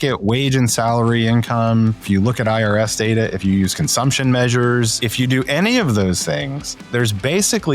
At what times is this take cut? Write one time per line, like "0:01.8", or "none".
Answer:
0:02.0
0:05.0
0:06.9

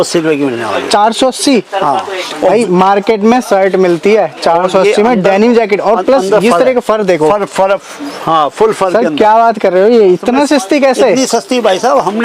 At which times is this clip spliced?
none

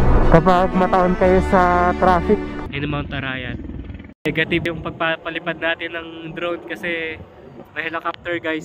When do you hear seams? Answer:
0:02.6
0:04.3

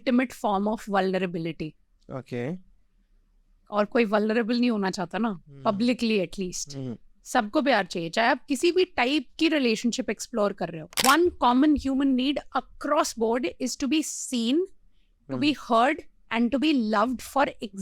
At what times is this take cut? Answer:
0:11.0

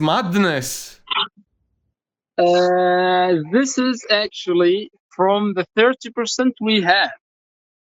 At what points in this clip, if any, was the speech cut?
none

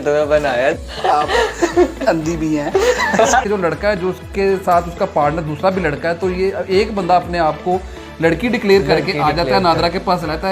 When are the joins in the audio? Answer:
0:00.8
0:03.4

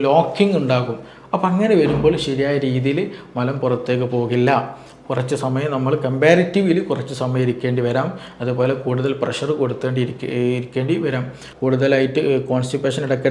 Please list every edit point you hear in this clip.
0:11.5

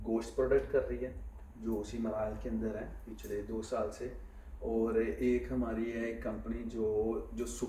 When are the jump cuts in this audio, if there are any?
none

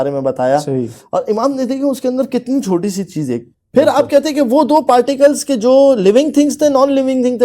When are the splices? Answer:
0:03.5

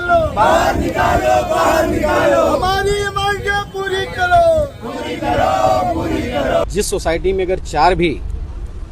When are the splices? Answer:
0:06.6

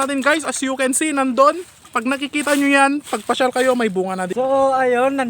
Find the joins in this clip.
0:04.3

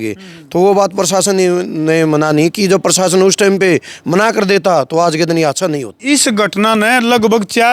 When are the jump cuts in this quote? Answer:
0:05.9

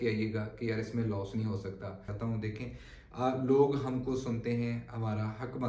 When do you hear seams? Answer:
0:02.1

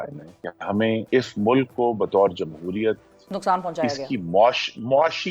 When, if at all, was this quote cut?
0:01.0

